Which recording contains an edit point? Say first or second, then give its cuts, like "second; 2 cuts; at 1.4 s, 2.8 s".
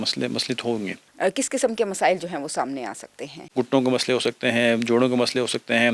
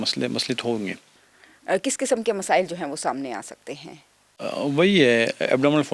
first; 2 cuts; at 1.0 s, 3.5 s